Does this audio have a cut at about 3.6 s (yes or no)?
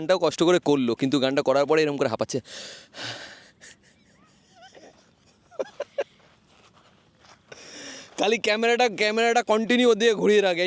no